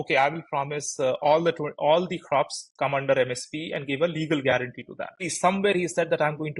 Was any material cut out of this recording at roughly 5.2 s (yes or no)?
yes